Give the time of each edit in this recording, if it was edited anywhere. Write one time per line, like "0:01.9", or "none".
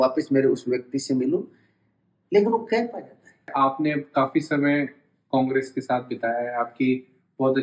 0:03.4

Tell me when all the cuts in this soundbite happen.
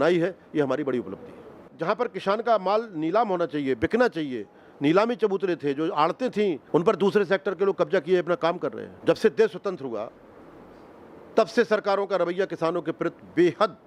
0:01.7
0:06.6
0:08.9

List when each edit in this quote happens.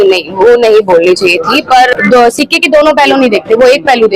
0:01.9

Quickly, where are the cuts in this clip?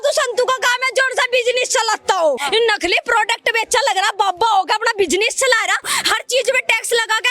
0:02.4
0:05.9

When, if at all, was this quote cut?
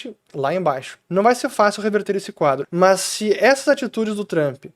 0:00.9
0:02.6

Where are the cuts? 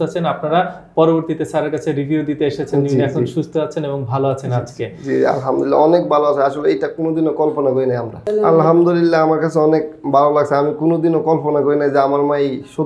0:08.1

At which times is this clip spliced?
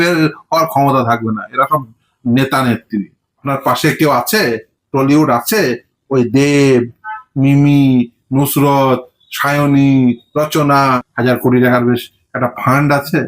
0:03.4
0:10.8

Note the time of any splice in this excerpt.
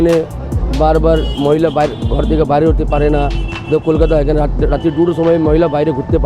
none

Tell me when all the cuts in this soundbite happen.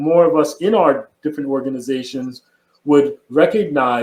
none

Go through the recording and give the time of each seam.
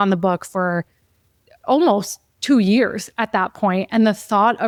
none

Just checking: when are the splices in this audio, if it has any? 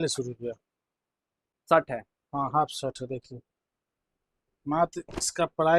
0:01.5

